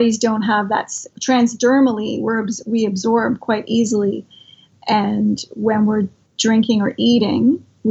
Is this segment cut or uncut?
cut